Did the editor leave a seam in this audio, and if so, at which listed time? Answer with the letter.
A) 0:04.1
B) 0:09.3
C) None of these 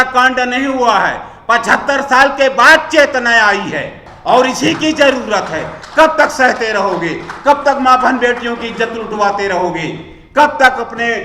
A